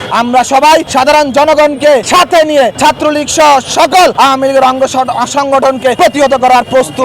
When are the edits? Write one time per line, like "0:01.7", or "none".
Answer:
0:00.9
0:02.1
0:02.7
0:04.1
0:05.9